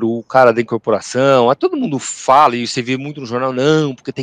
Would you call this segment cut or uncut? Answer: cut